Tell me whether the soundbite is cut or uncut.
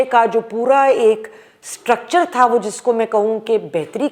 uncut